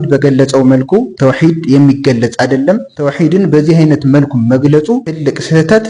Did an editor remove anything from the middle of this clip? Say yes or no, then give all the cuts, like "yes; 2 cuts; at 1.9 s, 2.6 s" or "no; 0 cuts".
no; 0 cuts